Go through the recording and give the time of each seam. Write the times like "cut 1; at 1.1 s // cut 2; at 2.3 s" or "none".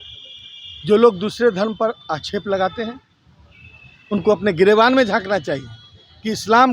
none